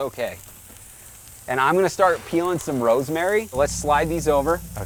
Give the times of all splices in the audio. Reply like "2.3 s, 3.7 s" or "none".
none

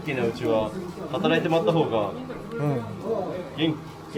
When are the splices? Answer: none

